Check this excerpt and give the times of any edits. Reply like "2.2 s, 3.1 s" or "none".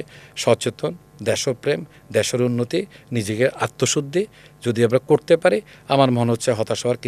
none